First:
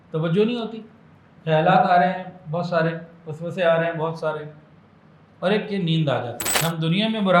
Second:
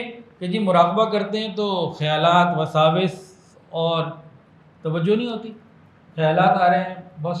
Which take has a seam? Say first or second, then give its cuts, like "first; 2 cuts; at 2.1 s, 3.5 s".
first; 1 cut; at 6.4 s